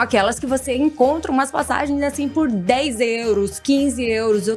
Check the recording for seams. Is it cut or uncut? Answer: uncut